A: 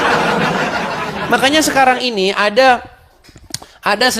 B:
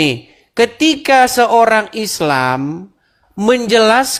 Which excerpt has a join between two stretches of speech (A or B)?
A